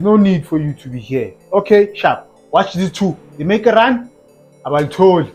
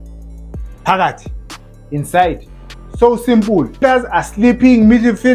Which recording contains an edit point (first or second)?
second